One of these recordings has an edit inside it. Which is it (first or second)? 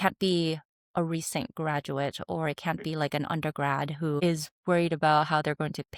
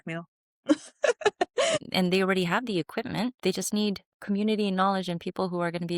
second